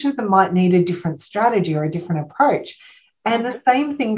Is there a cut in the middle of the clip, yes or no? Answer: no